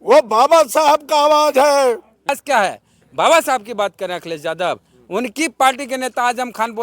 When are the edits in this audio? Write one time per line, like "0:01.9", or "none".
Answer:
0:02.4